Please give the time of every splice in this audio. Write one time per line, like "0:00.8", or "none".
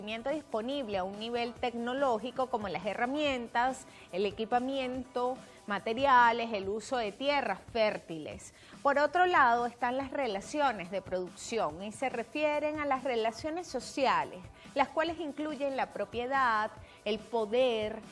0:10.0

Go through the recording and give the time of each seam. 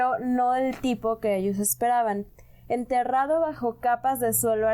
none

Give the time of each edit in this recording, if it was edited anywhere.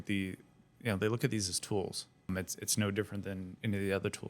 0:02.3

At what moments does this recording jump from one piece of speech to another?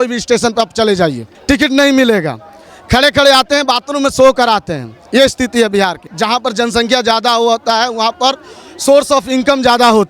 0:01.3
0:06.0

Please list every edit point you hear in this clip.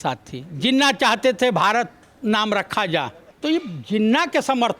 0:03.2

